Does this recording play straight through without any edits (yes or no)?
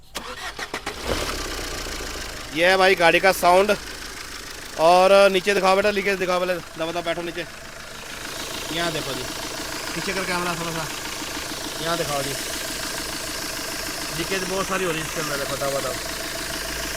yes